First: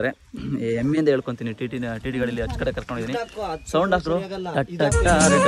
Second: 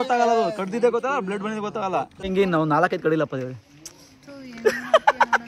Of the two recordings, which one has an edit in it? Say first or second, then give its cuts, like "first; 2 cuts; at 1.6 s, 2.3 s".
second; 1 cut; at 2.3 s